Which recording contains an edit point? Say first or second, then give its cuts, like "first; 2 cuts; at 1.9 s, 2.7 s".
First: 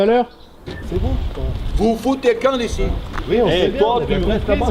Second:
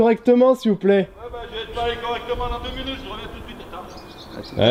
first; 2 cuts; at 0.8 s, 3.1 s